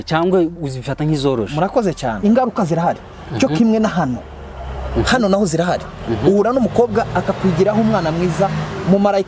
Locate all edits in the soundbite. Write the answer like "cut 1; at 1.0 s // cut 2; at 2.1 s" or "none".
cut 1; at 2.2 s